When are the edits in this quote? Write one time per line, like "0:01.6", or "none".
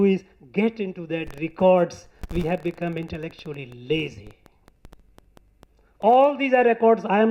none